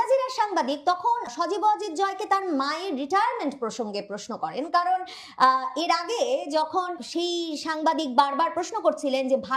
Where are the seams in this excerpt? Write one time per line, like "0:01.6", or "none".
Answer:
0:01.3
0:07.0

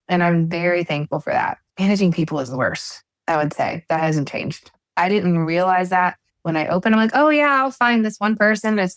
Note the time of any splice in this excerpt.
none

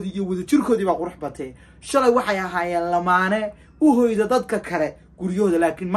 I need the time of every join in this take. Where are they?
none

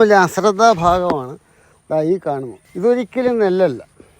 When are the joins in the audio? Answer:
0:02.6

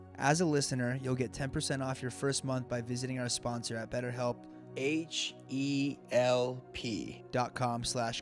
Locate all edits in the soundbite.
0:04.7
0:07.1

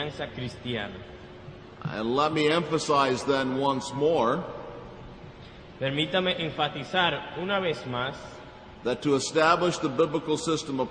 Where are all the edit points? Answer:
none

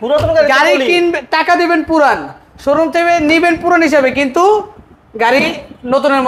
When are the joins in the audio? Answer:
none

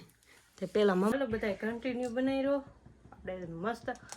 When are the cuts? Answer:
0:01.1

